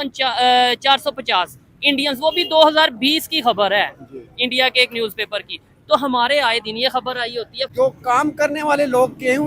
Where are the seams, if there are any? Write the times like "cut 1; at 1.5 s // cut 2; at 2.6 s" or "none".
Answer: cut 1; at 7.6 s